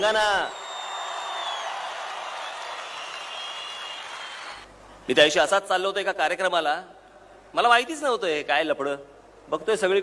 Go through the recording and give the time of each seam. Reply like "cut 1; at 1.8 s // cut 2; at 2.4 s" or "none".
cut 1; at 4.6 s

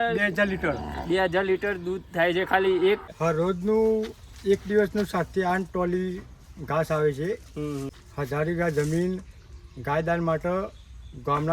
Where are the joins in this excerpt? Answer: cut 1; at 3.1 s // cut 2; at 8.0 s

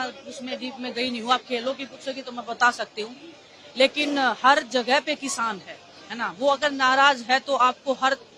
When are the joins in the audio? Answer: none

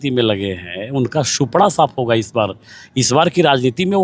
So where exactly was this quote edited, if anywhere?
none

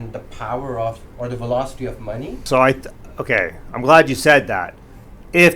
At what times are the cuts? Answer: cut 1; at 2.4 s

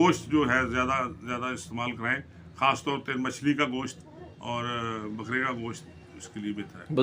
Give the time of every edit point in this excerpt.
none

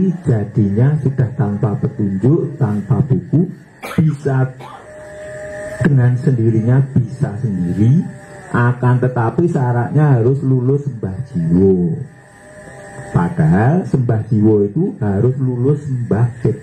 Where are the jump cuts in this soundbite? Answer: none

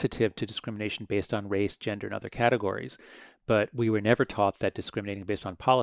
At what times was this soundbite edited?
none

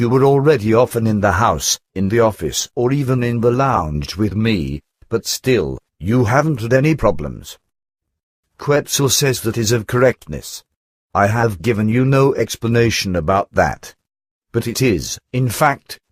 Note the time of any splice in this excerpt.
cut 1; at 8.5 s

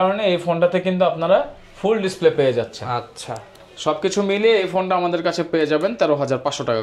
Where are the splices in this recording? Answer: none

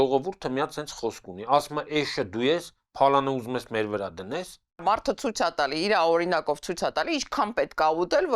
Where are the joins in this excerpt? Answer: cut 1; at 4.8 s

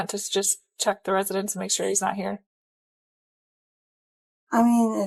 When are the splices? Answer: none

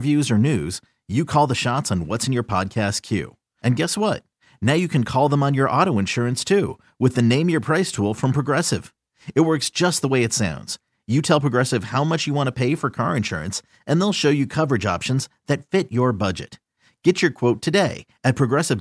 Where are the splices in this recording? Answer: none

